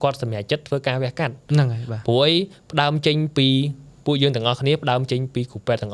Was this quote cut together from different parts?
no; 0 cuts

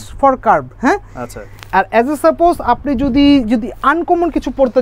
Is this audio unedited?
yes; 0 cuts

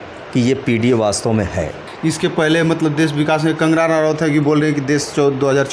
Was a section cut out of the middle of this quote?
yes; 1 cut; at 1.8 s

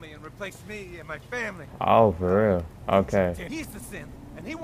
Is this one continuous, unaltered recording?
no; 3 cuts; at 1.7 s, 2.7 s, 3.5 s

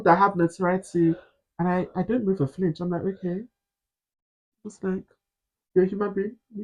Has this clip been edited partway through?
no; 0 cuts

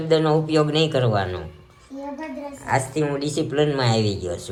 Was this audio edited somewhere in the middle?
no; 0 cuts

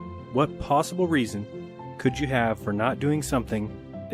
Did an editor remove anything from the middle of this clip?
yes; 1 cut; at 2.6 s

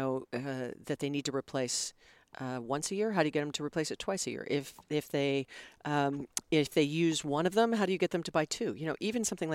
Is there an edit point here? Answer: no; 0 cuts

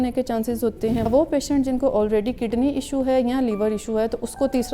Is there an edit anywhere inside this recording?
yes; 1 cut; at 1.1 s

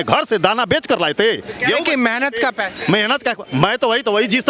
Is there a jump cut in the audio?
no; 0 cuts

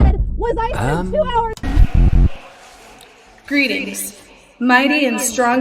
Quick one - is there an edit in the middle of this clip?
yes; 1 cut; at 1.6 s

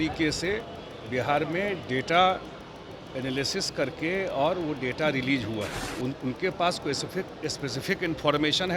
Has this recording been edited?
yes; 1 cut; at 5.7 s

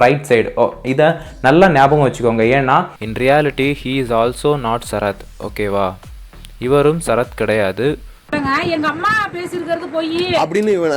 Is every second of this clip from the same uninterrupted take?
no; 2 cuts; at 3.0 s, 8.2 s

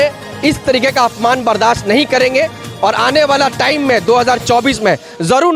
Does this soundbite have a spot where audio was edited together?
no; 0 cuts

